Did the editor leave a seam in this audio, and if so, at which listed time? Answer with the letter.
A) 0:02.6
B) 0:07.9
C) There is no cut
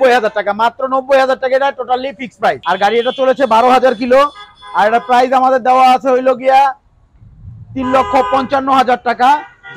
A